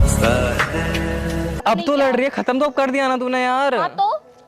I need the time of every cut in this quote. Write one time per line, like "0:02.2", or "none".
0:01.5